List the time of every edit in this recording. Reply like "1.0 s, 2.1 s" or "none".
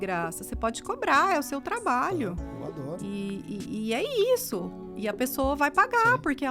2.5 s